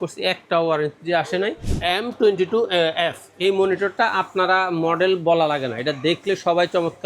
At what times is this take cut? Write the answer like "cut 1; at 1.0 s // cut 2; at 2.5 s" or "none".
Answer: cut 1; at 1.7 s